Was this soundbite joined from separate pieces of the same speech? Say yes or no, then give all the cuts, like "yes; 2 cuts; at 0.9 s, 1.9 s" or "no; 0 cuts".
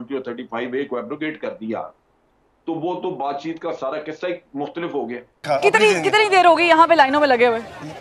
yes; 1 cut; at 5.4 s